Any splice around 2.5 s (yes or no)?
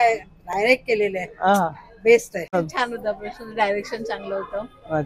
yes